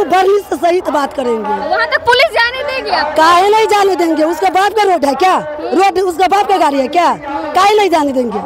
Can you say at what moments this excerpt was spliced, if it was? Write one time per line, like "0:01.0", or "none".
none